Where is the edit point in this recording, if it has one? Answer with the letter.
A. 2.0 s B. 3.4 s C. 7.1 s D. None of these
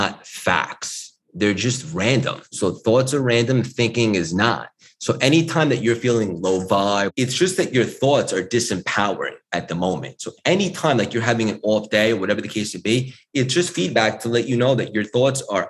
C